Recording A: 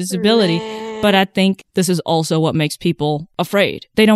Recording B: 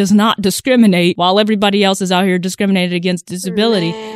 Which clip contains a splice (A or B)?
B